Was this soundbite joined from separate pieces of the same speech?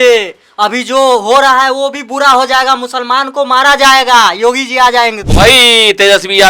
yes; 1 cut; at 5.3 s

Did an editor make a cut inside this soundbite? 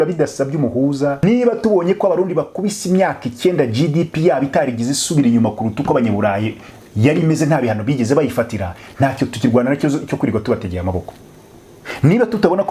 yes; 1 cut; at 1.2 s

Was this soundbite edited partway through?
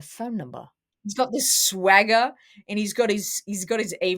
yes; 1 cut; at 1.2 s

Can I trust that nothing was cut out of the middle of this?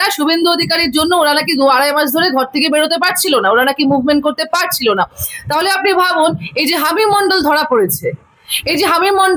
yes; 0 cuts

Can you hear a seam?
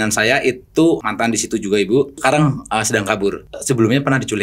yes; 3 cuts; at 1.0 s, 2.2 s, 3.5 s

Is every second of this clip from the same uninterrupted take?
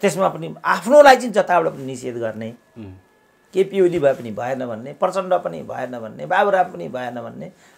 yes; 0 cuts

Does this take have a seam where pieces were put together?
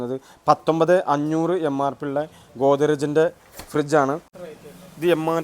yes; 1 cut; at 4.3 s

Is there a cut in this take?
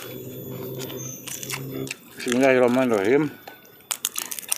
yes; 1 cut; at 1.9 s

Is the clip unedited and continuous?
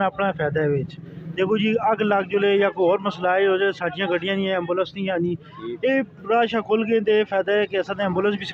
yes; 0 cuts

